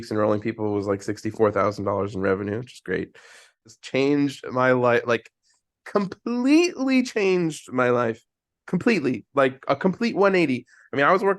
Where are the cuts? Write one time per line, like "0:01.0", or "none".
0:03.6